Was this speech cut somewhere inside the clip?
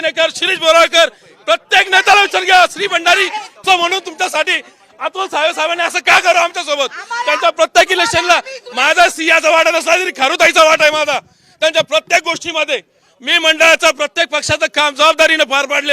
yes; 1 cut; at 3.5 s

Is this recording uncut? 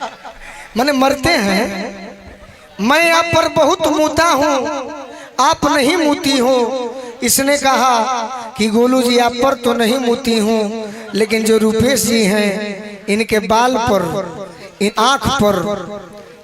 no; 1 cut; at 14.9 s

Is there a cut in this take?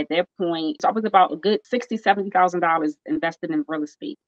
yes; 2 cuts; at 0.8 s, 1.6 s

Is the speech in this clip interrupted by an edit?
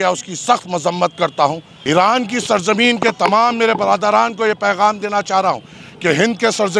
yes; 1 cut; at 1.7 s

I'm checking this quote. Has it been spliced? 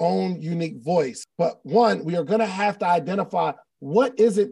yes; 1 cut; at 1.2 s

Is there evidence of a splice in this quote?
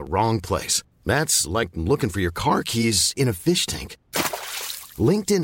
no; 0 cuts

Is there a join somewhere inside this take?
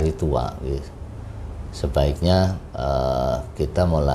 no; 0 cuts

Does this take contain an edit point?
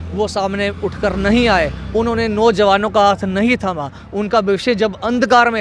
no; 0 cuts

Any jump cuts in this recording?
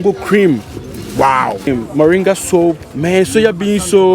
yes; 2 cuts; at 1.7 s, 2.9 s

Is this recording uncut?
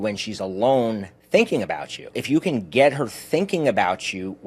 no; 2 cuts; at 1.1 s, 2.2 s

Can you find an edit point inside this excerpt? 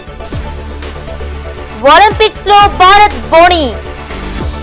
yes; 1 cut; at 1.1 s

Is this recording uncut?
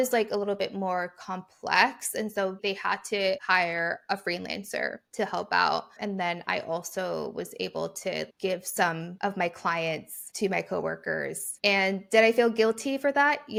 yes; 0 cuts

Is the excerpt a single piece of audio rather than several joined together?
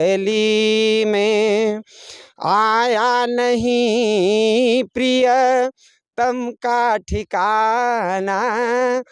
yes; 0 cuts

